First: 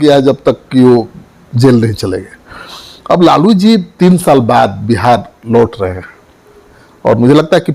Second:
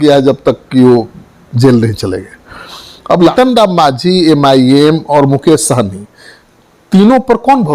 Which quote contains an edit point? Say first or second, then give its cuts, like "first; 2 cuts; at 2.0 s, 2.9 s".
second; 1 cut; at 3.3 s